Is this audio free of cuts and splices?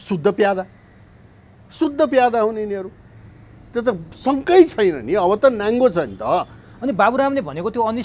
yes; 0 cuts

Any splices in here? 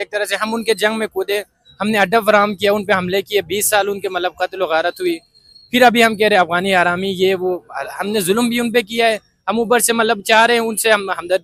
no; 0 cuts

